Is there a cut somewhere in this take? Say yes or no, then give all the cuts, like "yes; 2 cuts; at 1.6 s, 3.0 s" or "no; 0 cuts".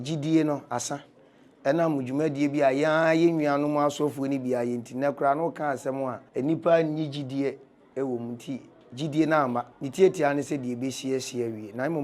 yes; 2 cuts; at 6.2 s, 9.8 s